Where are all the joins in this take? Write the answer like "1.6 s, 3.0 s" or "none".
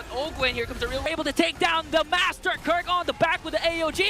1.1 s